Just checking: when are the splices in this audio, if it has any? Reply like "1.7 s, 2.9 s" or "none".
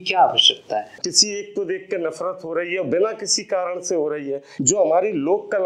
1.0 s, 4.5 s